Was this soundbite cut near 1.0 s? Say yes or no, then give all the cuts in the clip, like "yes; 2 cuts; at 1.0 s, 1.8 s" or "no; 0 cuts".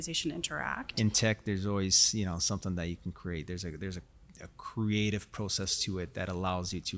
yes; 1 cut; at 1.0 s